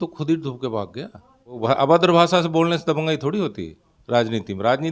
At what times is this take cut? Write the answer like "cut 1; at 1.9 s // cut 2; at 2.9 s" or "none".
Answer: cut 1; at 1.6 s